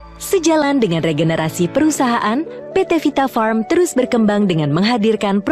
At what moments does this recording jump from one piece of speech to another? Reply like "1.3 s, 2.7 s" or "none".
1.8 s